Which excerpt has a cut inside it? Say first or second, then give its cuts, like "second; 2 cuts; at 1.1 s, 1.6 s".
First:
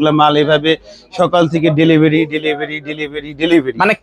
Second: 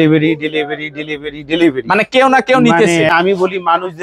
second; 1 cut; at 3.1 s